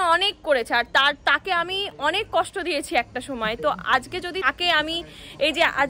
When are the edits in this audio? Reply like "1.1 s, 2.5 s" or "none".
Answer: none